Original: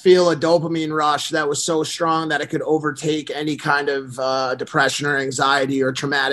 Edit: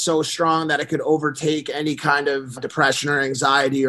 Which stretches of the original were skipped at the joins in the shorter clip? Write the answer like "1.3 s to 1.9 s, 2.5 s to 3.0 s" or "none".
4.2 s to 4.5 s